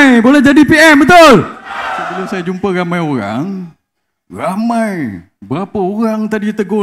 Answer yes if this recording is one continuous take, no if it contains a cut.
no